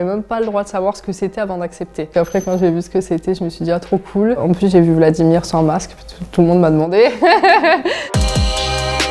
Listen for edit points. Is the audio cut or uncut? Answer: cut